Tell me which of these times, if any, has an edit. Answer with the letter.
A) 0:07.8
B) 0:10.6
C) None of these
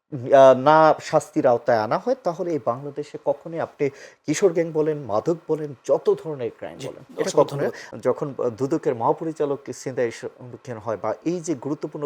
A